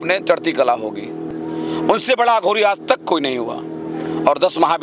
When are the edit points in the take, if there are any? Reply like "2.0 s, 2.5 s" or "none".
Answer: 1.2 s